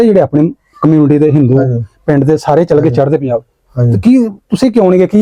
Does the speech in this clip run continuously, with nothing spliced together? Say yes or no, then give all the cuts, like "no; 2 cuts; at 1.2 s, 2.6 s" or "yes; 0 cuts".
yes; 0 cuts